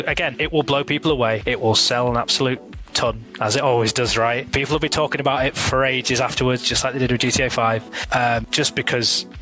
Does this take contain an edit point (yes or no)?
yes